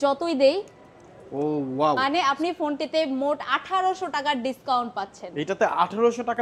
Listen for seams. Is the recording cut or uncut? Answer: cut